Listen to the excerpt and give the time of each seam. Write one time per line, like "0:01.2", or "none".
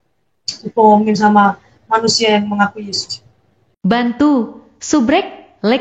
0:03.8